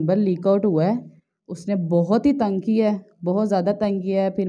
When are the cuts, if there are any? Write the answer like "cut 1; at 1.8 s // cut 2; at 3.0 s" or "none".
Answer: none